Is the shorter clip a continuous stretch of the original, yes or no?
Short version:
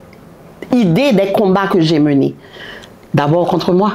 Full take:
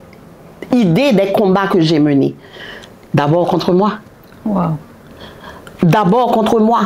yes